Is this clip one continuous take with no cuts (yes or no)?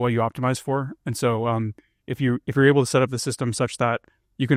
yes